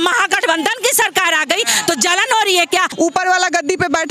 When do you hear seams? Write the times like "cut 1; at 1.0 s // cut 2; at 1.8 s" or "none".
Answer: cut 1; at 2.9 s

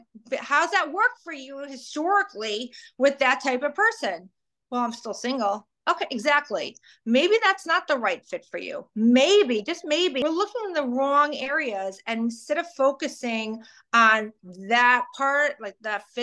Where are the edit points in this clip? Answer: cut 1; at 10.2 s

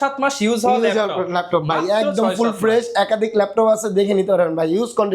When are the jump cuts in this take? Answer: none

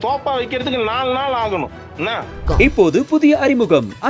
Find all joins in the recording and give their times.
cut 1; at 2.4 s

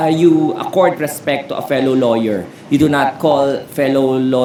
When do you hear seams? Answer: none

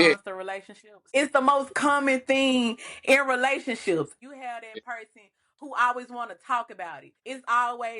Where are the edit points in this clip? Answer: cut 1; at 1.1 s // cut 2; at 4.2 s // cut 3; at 7.1 s

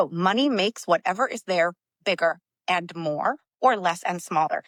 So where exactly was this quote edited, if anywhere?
none

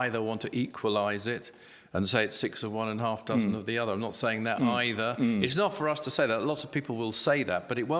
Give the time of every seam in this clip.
none

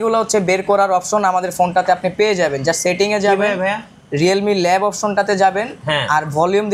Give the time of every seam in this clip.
none

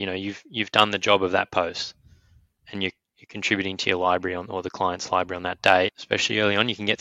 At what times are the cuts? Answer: cut 1; at 6.0 s

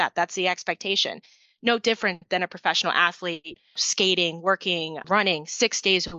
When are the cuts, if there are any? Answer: cut 1; at 3.8 s // cut 2; at 5.0 s

